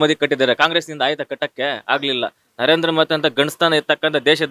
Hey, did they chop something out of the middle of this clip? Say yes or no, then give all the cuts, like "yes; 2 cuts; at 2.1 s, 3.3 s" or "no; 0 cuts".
no; 0 cuts